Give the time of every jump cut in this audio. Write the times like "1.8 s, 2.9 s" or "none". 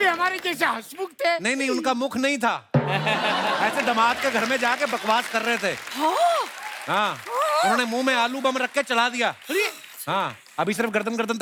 none